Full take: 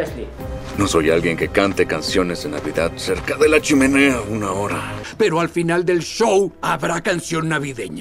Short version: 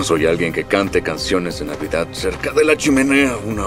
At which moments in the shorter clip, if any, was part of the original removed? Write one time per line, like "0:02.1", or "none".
none